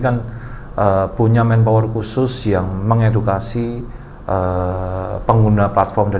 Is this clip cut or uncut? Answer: uncut